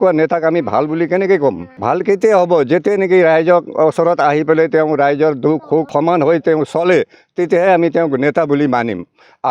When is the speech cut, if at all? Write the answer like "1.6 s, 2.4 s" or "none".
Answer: 1.7 s, 5.9 s